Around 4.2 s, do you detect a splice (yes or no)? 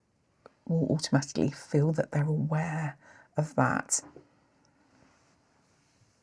yes